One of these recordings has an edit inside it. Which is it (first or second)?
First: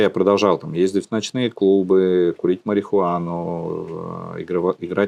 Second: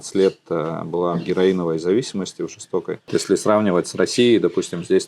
second